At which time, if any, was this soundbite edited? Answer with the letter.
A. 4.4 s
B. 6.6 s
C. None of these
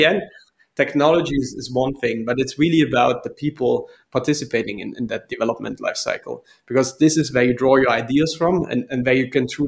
C